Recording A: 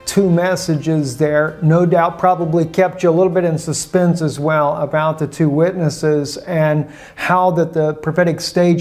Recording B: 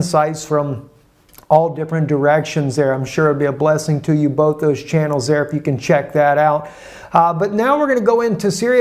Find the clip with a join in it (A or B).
A